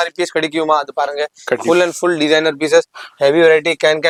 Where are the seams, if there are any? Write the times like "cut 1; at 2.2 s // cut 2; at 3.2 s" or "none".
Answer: none